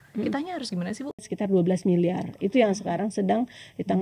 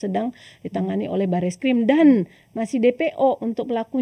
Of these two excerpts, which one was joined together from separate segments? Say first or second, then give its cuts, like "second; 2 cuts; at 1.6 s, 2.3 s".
first; 1 cut; at 1.2 s